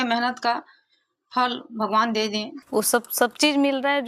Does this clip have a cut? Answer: yes; 1 cut; at 2.5 s

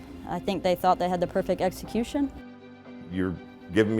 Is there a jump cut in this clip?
yes; 1 cut; at 2.9 s

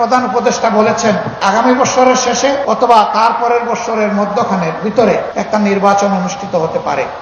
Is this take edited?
yes; 3 cuts; at 1.4 s, 2.6 s, 5.3 s

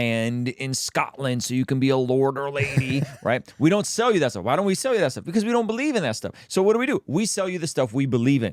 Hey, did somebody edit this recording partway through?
no; 0 cuts

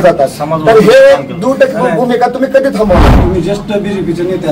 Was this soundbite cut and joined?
yes; 1 cut; at 3.2 s

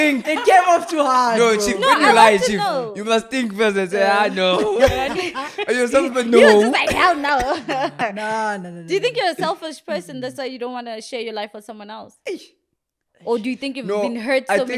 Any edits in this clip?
no; 0 cuts

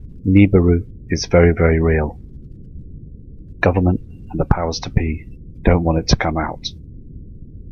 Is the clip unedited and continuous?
no; 1 cut; at 1.9 s

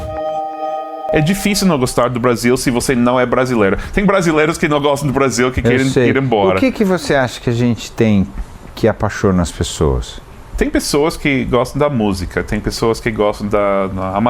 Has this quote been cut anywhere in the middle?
yes; 2 cuts; at 1.1 s, 10.4 s

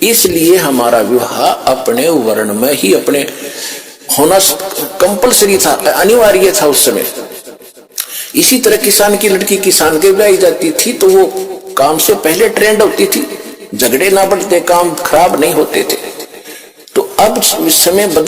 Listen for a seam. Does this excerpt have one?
no; 0 cuts

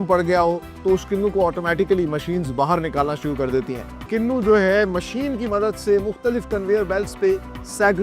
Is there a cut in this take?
yes; 1 cut; at 4.1 s

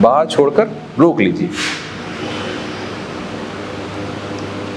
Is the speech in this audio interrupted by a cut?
no; 0 cuts

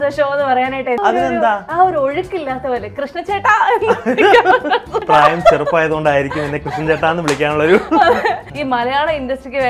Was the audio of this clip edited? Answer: yes; 3 cuts; at 1.0 s, 5.0 s, 8.5 s

